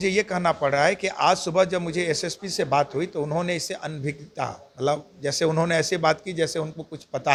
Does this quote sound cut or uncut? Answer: uncut